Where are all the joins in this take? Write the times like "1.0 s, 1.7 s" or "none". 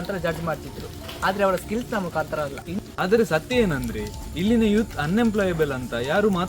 2.8 s